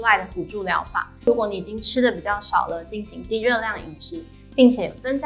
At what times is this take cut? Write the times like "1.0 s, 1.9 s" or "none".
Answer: 1.3 s

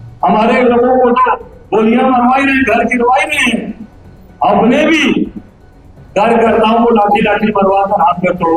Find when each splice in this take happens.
none

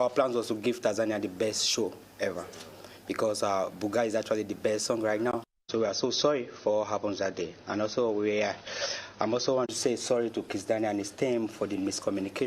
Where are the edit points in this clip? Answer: none

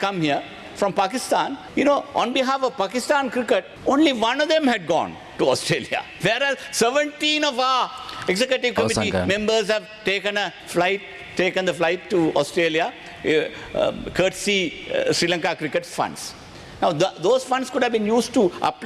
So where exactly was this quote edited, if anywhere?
1.6 s, 3.7 s, 6.0 s, 10.6 s

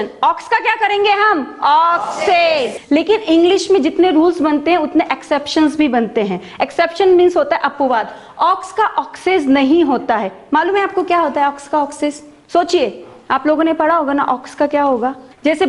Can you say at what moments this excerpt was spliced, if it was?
none

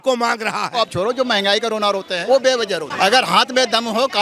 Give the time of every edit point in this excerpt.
0.8 s, 2.1 s, 2.9 s

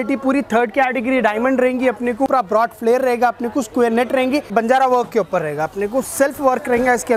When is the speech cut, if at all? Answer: 2.3 s, 4.5 s

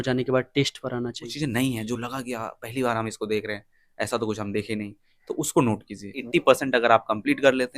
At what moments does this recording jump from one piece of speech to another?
1.3 s, 6.2 s

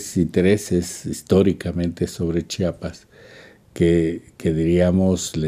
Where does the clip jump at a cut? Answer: 3.3 s

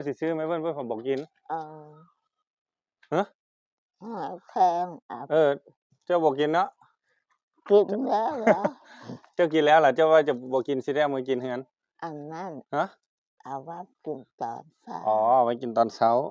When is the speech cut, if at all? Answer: none

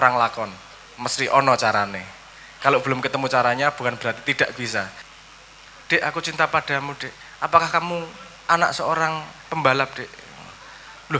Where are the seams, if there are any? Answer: 5.0 s

